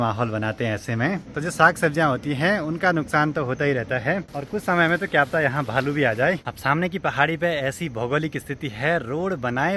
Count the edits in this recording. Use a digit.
3